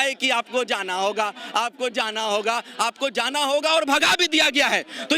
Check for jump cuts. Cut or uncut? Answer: uncut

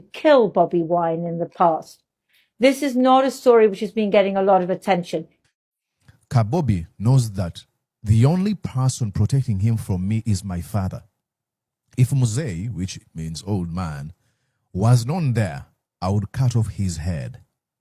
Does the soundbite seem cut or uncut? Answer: cut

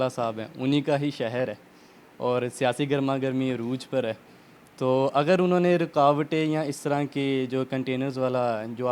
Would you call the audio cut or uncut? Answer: uncut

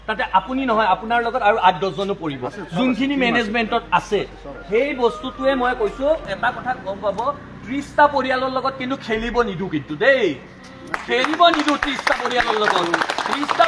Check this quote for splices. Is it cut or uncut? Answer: cut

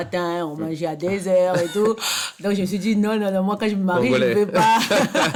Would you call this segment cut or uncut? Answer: uncut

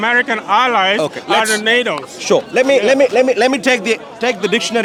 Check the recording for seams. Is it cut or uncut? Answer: uncut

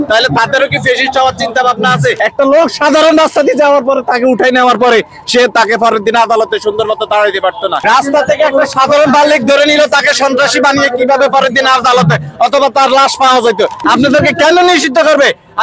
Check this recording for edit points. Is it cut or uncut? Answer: cut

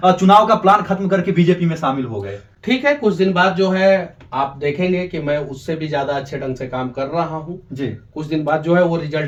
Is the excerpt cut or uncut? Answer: uncut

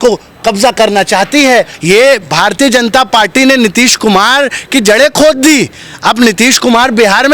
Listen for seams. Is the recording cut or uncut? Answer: cut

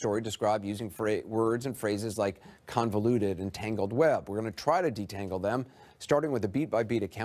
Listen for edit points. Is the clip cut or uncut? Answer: cut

